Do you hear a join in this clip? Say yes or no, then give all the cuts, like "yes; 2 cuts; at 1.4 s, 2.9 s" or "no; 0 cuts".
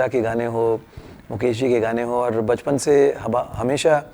no; 0 cuts